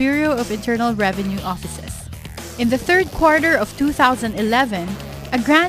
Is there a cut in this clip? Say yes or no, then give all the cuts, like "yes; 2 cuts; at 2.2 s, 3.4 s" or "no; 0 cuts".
yes; 1 cut; at 2.0 s